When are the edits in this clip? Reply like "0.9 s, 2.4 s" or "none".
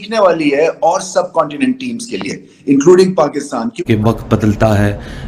3.6 s